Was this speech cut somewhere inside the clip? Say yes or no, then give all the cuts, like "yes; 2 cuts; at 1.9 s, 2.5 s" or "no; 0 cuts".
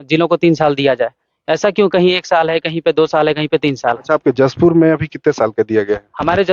no; 0 cuts